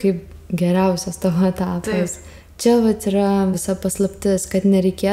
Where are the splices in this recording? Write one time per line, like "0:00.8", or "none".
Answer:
0:03.6